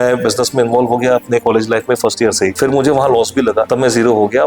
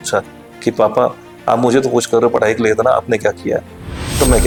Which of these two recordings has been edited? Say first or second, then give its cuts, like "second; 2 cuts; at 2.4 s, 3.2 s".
first; 2 cuts; at 2.5 s, 3.7 s